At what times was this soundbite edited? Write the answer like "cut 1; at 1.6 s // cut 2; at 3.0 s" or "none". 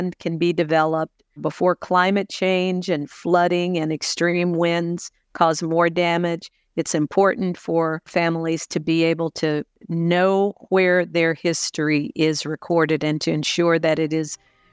cut 1; at 1.4 s // cut 2; at 8.1 s // cut 3; at 9.8 s